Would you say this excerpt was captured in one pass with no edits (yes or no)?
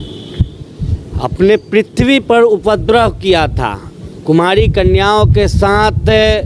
yes